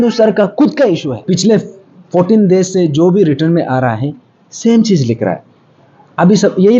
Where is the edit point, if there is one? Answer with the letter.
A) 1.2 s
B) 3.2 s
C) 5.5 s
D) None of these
A